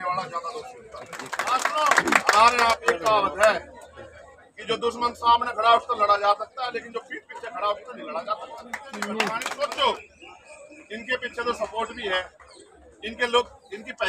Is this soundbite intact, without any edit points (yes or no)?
no